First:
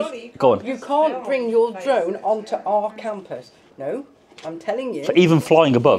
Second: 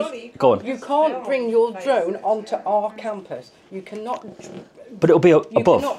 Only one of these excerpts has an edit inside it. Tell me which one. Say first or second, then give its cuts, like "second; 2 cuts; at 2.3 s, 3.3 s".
first; 1 cut; at 3.7 s